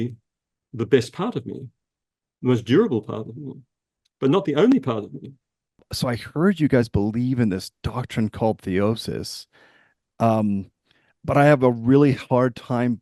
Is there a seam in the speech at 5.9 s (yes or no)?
yes